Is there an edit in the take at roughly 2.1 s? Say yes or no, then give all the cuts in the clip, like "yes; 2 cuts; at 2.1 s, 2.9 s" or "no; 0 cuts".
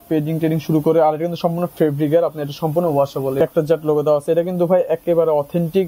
no; 1 cut; at 3.4 s